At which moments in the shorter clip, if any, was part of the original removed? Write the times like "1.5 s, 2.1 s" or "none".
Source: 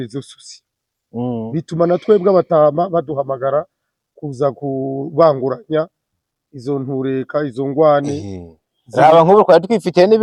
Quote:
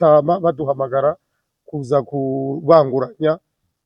none

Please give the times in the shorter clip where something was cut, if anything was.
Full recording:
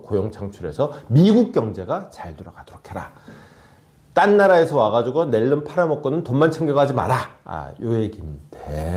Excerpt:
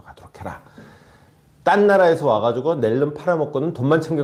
none

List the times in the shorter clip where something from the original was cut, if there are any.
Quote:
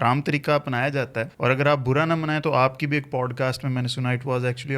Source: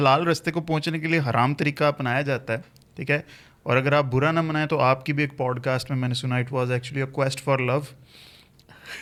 1.3 s

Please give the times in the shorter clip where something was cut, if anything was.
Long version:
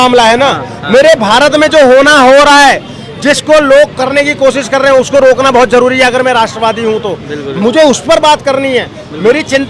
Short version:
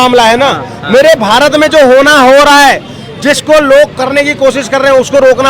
none

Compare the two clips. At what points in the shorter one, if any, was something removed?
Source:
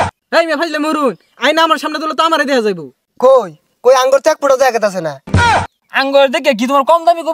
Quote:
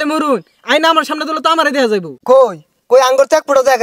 2.1 s

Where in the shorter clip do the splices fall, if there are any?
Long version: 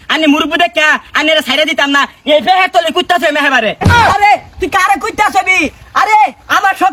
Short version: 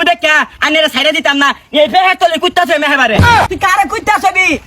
3.3 s

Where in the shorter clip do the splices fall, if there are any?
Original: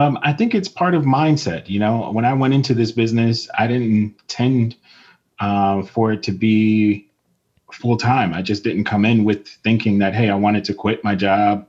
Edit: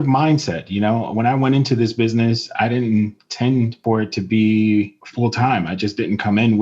3.8 s, 5.0 s

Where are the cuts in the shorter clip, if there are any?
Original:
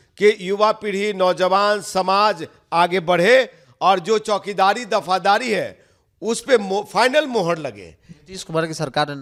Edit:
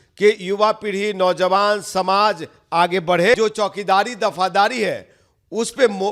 3.3 s

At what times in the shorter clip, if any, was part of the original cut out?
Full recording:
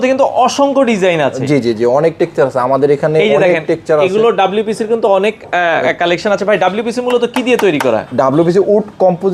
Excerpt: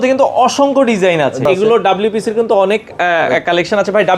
1.5 s

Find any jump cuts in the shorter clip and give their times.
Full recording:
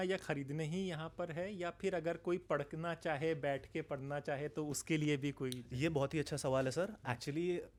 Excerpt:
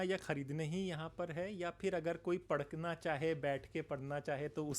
none

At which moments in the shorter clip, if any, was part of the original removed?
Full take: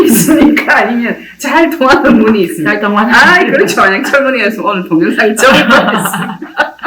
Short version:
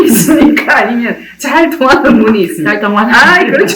none

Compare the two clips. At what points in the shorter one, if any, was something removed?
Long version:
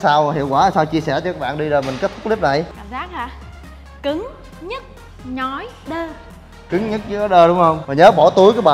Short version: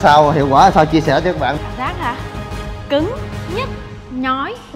1.6 s

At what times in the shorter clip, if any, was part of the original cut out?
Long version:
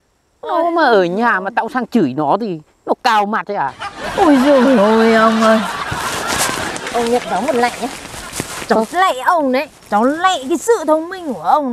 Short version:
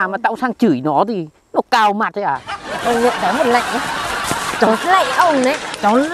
2.7 s

